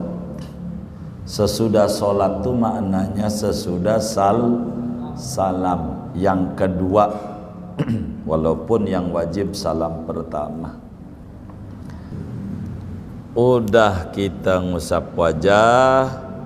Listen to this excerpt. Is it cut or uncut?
cut